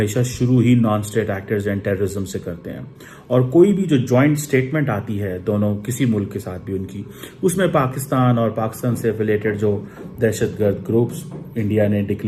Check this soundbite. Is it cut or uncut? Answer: uncut